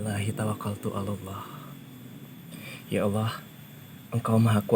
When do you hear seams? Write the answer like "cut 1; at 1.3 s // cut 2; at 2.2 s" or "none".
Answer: none